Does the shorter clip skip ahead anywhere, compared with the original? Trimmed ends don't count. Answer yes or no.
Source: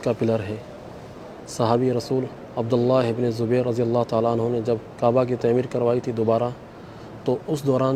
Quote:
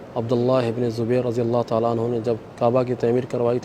no